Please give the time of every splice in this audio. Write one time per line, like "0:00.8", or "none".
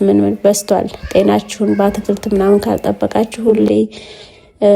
none